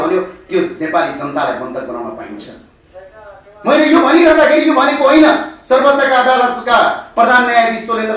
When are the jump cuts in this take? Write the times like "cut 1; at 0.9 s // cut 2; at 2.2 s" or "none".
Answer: none

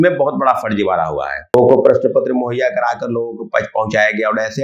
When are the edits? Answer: cut 1; at 1.5 s

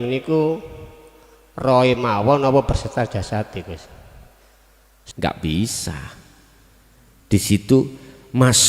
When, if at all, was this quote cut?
cut 1; at 5.1 s

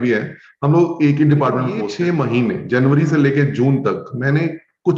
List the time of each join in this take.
cut 1; at 1.8 s

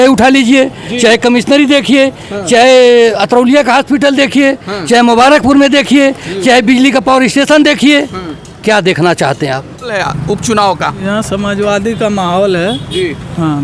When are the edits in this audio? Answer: cut 1; at 9.9 s

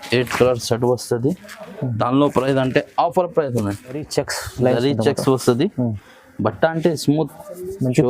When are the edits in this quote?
cut 1; at 4.1 s

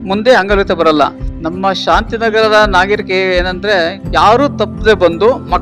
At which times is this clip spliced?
cut 1; at 1.2 s

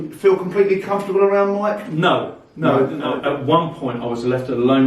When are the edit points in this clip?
cut 1; at 3.1 s

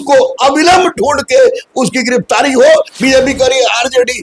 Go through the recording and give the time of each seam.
cut 1; at 2.9 s

